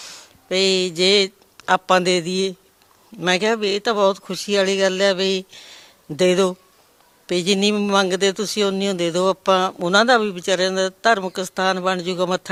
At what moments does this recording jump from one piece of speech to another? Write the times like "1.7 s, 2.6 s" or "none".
none